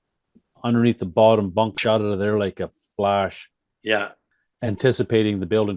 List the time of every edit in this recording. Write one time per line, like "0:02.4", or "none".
0:01.8
0:04.2

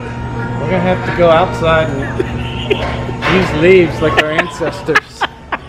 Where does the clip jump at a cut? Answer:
none

